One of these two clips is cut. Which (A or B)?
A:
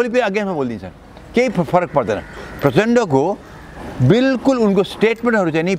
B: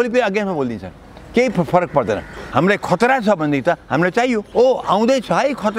B